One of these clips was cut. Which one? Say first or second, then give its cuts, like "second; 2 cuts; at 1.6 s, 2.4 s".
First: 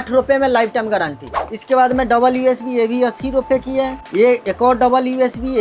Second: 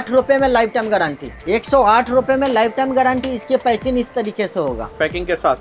first; 1 cut; at 1.4 s